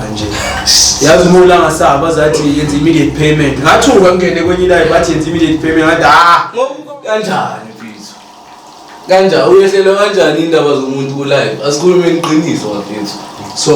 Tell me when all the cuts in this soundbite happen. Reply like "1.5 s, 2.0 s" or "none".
6.8 s